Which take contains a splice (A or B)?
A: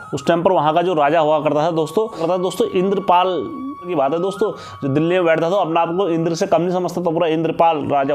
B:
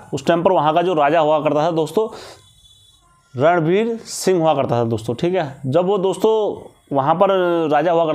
A